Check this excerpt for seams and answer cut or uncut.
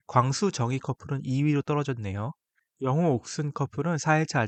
uncut